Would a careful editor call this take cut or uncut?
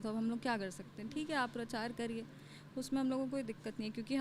uncut